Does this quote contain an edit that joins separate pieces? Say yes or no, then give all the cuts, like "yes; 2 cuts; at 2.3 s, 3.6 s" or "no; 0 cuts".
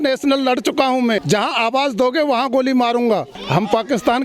yes; 2 cuts; at 1.2 s, 3.4 s